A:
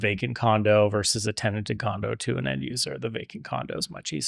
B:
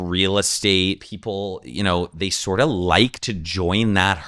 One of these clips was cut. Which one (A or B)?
B